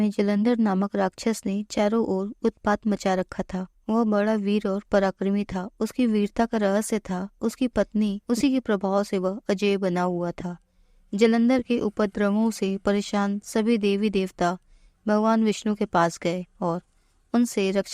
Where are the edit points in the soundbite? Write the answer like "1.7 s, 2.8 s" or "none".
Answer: 8.2 s